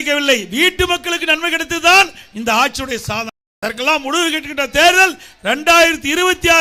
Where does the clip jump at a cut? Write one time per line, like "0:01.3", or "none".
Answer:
0:03.4